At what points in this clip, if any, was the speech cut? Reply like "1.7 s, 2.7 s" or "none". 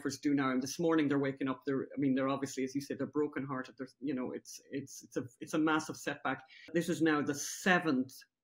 6.7 s